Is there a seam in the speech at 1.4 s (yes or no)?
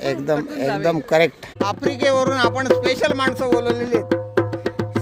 yes